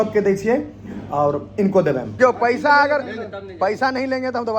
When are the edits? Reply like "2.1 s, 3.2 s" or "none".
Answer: 2.1 s